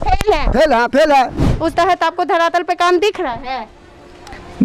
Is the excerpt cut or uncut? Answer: cut